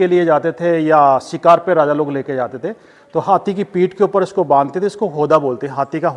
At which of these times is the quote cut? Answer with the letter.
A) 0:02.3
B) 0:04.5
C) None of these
C